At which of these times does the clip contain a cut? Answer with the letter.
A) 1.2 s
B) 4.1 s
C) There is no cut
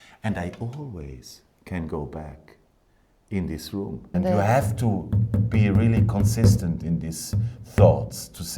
B